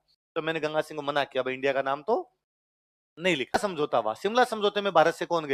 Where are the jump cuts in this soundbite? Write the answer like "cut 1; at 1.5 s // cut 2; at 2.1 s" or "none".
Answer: cut 1; at 3.5 s

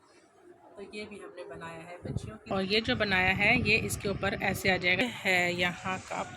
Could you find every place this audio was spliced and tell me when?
cut 1; at 2.4 s // cut 2; at 5.0 s

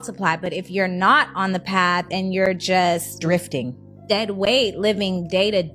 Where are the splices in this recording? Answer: none

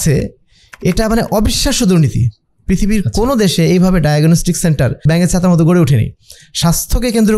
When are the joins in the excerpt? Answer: cut 1; at 5.0 s

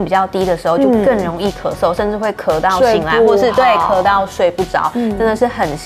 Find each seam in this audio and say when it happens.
none

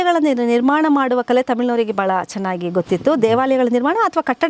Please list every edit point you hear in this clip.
none

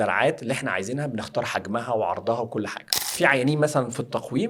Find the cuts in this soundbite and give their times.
cut 1; at 3.1 s

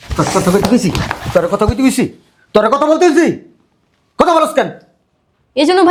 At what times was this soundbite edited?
none

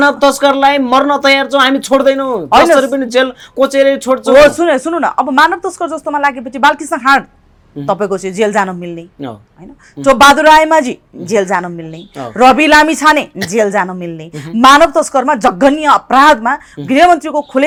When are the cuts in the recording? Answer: none

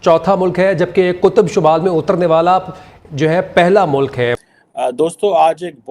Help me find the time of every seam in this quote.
cut 1; at 4.4 s

